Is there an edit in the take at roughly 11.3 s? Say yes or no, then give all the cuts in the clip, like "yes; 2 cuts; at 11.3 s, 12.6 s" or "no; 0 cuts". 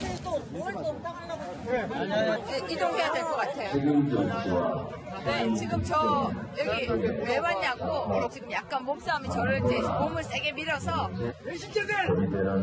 no; 0 cuts